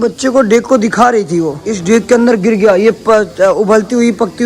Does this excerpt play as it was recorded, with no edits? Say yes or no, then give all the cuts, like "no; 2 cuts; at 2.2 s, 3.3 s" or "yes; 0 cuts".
no; 1 cut; at 1.7 s